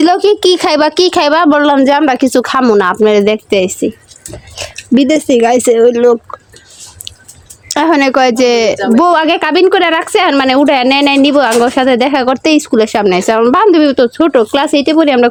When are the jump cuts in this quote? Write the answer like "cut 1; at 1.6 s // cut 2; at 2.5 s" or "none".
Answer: none